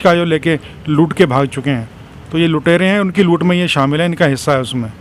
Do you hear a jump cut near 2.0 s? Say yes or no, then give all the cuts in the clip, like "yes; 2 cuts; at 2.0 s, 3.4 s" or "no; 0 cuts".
no; 0 cuts